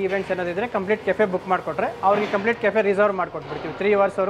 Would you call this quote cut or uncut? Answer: uncut